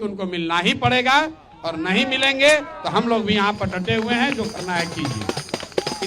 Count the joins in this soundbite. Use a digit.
0